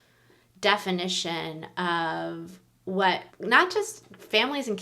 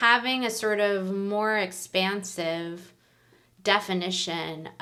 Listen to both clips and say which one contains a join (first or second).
first